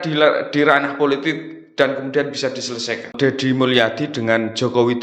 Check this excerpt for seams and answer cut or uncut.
cut